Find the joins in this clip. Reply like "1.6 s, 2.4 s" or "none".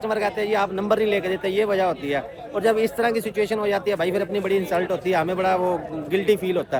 none